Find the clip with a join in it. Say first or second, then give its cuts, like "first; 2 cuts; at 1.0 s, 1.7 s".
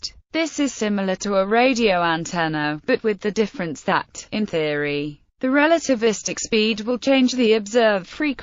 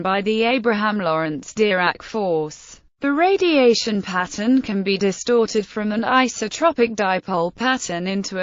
first; 1 cut; at 1.4 s